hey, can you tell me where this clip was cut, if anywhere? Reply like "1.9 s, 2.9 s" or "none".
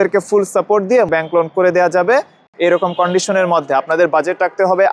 2.4 s